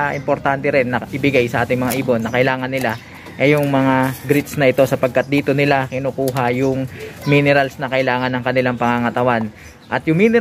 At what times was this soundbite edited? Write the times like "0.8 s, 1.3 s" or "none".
none